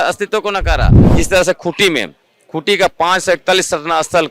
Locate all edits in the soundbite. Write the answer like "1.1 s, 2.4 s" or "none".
1.0 s